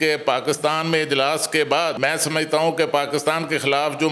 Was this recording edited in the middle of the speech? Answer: yes; 1 cut; at 2.0 s

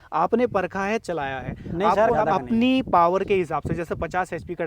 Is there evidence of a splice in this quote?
yes; 1 cut; at 2.1 s

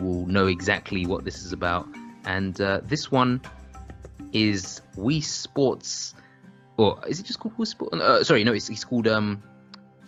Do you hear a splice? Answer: no; 0 cuts

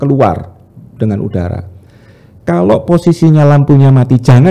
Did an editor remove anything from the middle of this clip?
no; 0 cuts

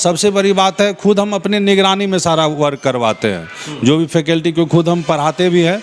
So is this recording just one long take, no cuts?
yes; 0 cuts

